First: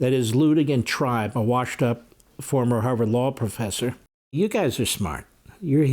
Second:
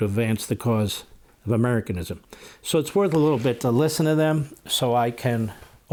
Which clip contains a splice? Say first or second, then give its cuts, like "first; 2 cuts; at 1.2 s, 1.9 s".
first; 1 cut; at 4.4 s